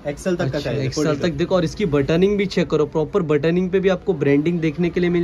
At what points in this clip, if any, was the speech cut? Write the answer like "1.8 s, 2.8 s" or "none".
none